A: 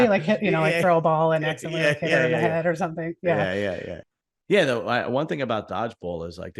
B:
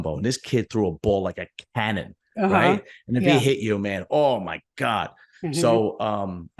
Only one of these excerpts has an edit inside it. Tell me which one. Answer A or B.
A